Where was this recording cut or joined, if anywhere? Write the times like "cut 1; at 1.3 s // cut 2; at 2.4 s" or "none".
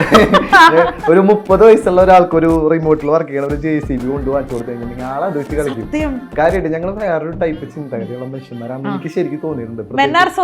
none